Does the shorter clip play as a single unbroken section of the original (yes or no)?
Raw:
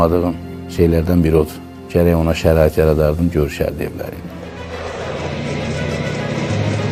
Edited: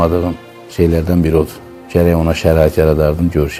yes